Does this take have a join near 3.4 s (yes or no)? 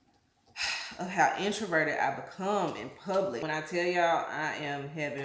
yes